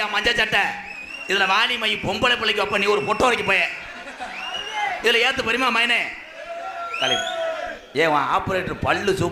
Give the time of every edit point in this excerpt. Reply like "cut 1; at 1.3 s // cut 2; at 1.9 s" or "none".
none